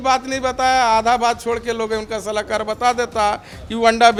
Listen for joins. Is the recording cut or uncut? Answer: uncut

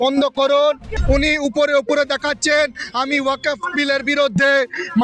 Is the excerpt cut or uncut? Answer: cut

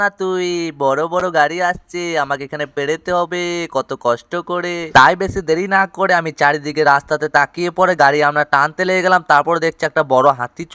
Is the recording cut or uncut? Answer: uncut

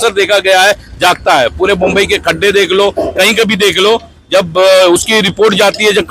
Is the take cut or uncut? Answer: uncut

